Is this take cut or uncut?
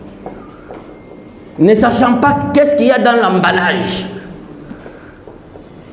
uncut